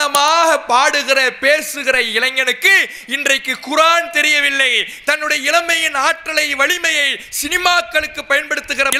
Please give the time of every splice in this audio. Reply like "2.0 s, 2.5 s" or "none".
none